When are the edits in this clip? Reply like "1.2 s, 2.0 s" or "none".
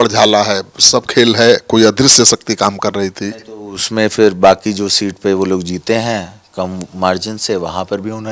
none